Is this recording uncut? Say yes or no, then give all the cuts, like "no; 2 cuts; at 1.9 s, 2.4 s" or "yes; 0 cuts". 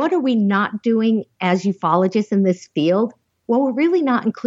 yes; 0 cuts